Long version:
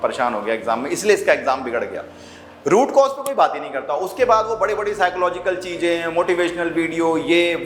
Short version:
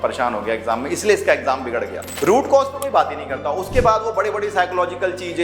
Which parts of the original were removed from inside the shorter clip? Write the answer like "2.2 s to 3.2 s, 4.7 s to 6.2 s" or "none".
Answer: 2.0 s to 2.5 s